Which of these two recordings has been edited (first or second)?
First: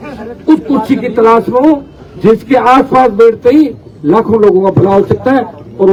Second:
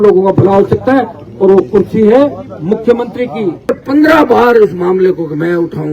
second